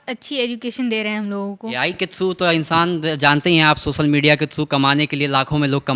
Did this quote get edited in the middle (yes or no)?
yes